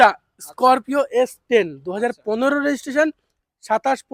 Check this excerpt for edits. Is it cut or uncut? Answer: uncut